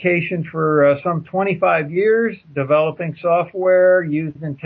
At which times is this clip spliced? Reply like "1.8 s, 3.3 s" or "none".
none